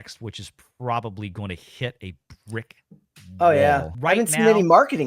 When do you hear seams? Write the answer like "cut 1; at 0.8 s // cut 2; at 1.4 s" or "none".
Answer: cut 1; at 3.9 s